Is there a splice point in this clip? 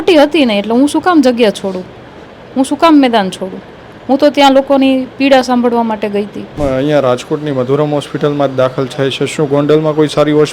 yes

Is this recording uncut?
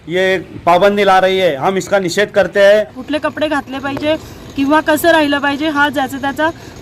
no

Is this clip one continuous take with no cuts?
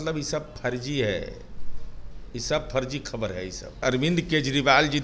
no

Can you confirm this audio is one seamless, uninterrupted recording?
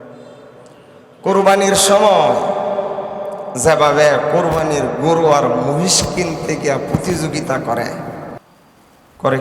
no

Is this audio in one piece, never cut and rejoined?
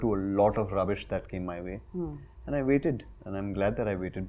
yes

